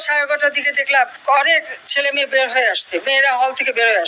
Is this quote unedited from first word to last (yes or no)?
no